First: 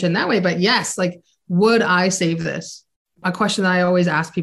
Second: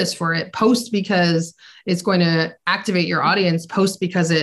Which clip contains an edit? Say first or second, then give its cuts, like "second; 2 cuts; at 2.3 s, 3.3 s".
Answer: first; 1 cut; at 3.2 s